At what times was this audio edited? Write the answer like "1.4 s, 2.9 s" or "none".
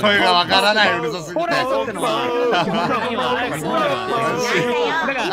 none